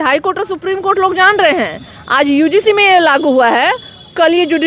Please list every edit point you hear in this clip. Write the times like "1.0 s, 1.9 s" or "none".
none